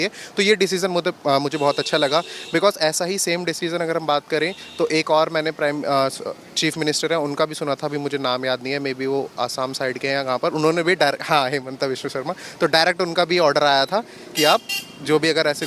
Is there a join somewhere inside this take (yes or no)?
no